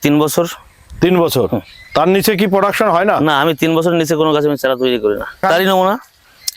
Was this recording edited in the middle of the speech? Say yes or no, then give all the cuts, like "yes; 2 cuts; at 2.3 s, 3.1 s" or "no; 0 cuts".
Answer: yes; 1 cut; at 5.4 s